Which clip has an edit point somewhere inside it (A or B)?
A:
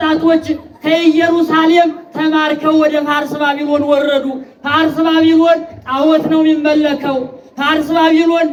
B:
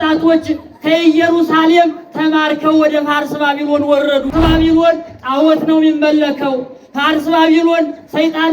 B